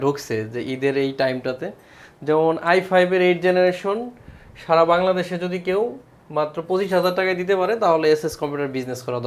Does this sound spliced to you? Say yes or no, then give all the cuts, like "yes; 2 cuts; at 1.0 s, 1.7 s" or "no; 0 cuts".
no; 0 cuts